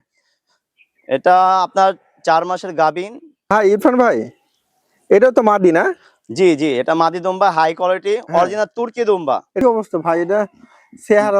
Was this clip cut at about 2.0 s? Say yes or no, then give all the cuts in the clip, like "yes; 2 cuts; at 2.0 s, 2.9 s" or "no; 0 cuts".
no; 2 cuts; at 3.5 s, 9.6 s